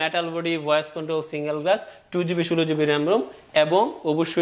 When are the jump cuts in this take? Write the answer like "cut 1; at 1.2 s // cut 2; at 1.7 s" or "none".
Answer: none